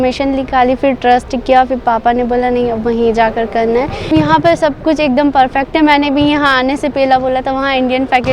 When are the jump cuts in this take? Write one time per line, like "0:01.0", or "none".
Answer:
0:04.1